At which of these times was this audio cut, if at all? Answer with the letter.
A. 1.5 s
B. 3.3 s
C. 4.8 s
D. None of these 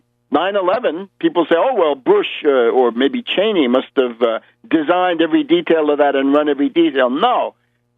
C